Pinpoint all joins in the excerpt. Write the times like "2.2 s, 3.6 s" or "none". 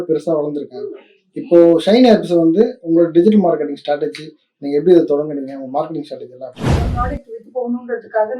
6.9 s

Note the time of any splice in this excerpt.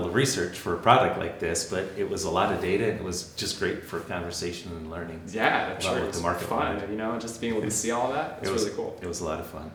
none

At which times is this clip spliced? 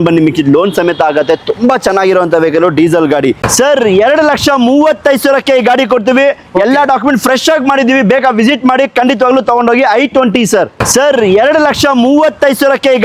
3.4 s, 10.8 s

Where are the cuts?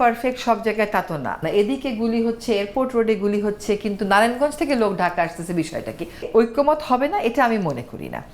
1.4 s, 6.3 s

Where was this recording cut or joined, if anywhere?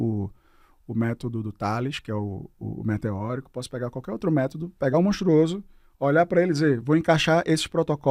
none

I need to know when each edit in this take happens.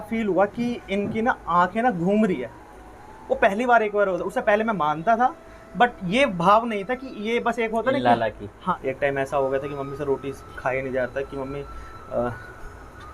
8.8 s

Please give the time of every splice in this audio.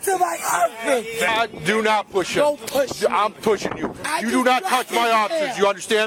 none

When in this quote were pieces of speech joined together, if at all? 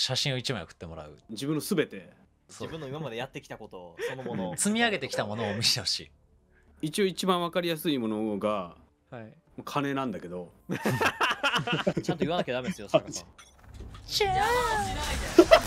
1.3 s, 2.4 s, 6.6 s, 12.0 s, 13.2 s

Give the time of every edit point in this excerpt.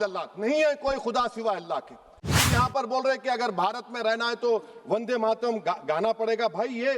2.3 s

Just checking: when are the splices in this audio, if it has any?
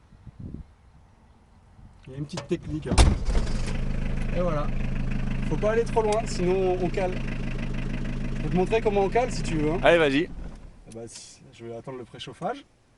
none

